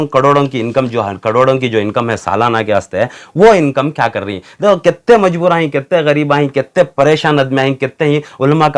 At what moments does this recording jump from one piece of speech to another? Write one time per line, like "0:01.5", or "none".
none